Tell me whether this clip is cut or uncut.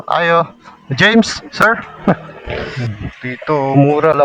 cut